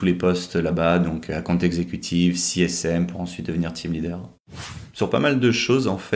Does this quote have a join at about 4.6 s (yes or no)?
yes